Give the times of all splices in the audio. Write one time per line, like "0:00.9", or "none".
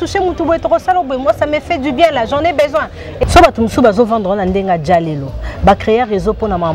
0:03.0